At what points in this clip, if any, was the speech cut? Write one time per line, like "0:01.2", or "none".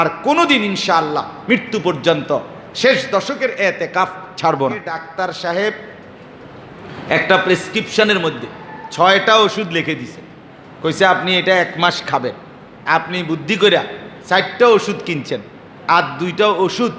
0:05.0